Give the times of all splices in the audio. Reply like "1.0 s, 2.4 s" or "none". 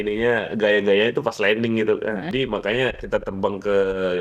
2.3 s